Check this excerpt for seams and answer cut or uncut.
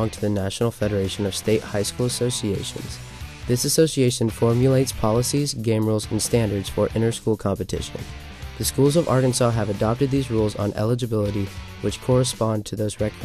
uncut